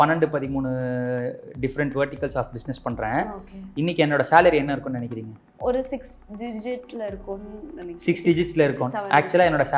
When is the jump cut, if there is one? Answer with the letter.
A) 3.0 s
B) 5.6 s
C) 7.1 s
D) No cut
D